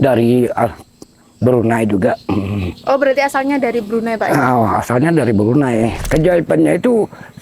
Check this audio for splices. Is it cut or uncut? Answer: cut